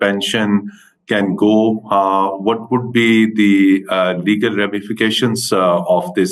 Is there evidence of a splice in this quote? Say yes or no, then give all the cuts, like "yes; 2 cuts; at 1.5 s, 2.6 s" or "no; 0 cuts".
no; 0 cuts